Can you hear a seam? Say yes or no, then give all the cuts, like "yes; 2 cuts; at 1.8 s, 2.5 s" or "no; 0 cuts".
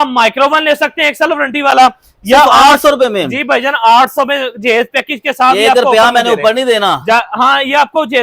no; 0 cuts